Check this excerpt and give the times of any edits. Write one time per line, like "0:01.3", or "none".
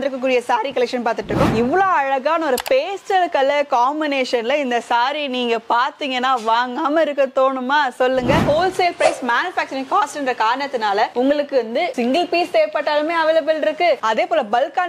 0:01.5
0:08.5